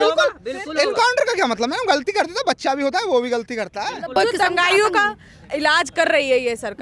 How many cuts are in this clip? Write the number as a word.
one